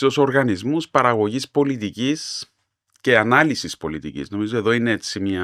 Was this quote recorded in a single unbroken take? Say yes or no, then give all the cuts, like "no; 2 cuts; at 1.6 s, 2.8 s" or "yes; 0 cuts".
yes; 0 cuts